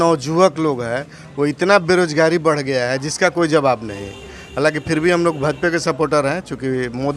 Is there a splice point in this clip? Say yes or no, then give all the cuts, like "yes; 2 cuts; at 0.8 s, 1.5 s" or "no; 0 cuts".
no; 0 cuts